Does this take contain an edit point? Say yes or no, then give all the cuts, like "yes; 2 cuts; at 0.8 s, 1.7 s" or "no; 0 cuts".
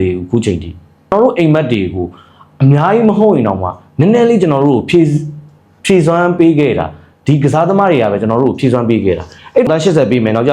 yes; 2 cuts; at 1.1 s, 9.7 s